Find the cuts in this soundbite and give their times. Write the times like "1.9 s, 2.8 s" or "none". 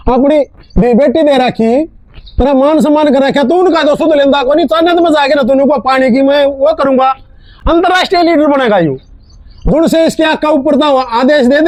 none